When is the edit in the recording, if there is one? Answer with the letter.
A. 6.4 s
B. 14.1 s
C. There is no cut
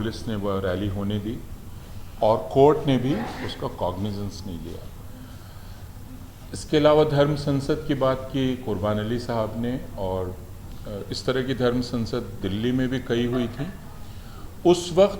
C